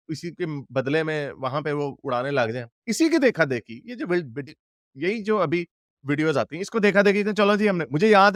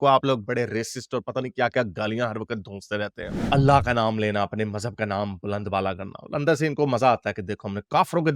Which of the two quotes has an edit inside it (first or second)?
second